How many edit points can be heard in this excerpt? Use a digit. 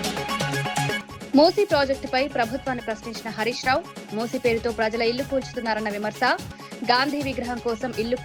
1